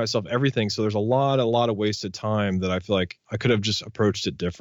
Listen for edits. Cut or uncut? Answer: cut